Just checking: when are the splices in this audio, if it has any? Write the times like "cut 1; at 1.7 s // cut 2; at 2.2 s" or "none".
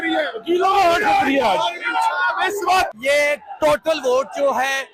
cut 1; at 2.9 s